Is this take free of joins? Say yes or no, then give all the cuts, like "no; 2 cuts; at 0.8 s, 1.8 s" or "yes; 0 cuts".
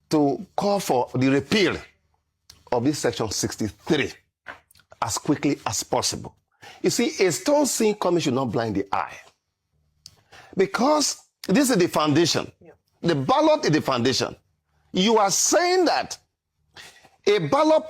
no; 1 cut; at 1.1 s